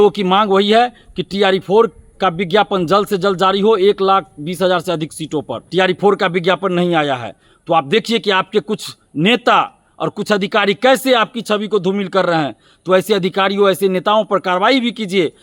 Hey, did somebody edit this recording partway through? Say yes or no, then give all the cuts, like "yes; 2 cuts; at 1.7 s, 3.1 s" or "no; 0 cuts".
yes; 1 cut; at 5.6 s